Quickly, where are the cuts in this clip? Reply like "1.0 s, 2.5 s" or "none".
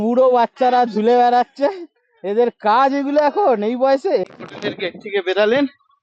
4.3 s